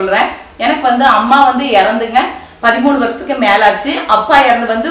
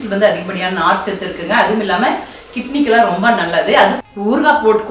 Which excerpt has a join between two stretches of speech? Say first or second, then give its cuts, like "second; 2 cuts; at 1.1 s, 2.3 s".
second; 1 cut; at 4.0 s